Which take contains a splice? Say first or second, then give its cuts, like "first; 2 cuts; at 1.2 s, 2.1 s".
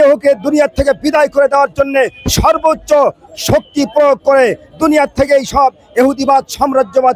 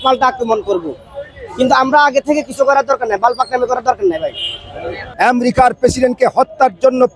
second; 1 cut; at 5.0 s